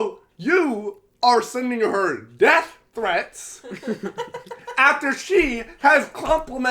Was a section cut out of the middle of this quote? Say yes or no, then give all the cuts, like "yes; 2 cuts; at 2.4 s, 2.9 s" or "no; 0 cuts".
no; 0 cuts